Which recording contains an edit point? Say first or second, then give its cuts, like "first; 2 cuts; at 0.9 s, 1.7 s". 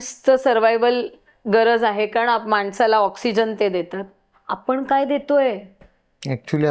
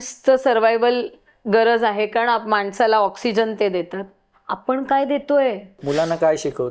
second; 1 cut; at 5.8 s